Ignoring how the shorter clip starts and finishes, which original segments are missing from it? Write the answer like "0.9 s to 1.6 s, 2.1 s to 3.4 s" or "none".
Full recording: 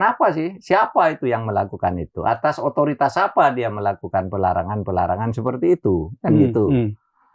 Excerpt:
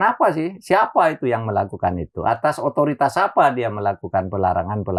none